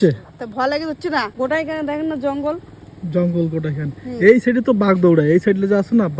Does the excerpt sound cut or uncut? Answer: cut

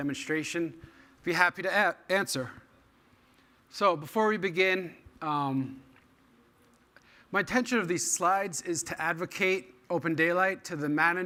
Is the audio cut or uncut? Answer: uncut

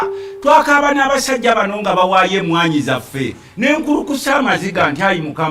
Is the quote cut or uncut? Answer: uncut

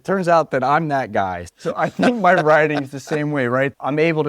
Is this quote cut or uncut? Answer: cut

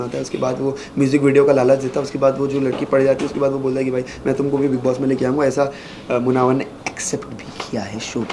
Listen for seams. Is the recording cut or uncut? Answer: uncut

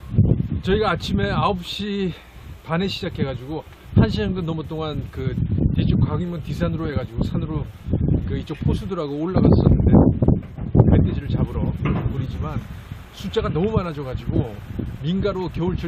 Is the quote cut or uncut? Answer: uncut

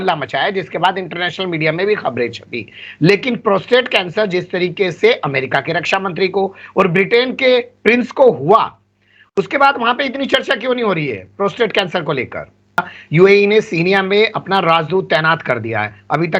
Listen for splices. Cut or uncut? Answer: cut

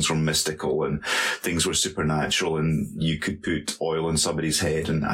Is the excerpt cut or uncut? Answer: uncut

